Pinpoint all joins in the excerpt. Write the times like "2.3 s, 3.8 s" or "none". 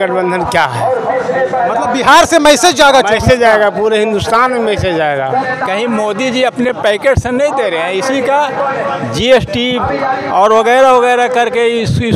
5.3 s